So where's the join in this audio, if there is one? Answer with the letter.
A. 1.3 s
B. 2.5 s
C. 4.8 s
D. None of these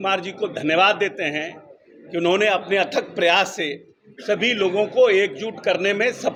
D